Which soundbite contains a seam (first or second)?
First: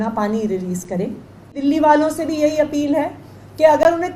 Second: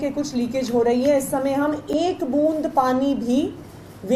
first